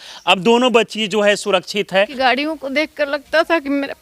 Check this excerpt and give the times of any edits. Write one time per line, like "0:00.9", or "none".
0:02.1